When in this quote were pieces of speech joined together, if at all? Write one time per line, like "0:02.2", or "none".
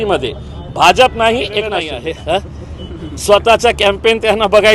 0:01.8